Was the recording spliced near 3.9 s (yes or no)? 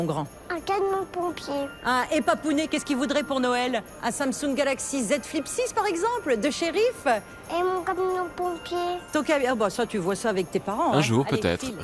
no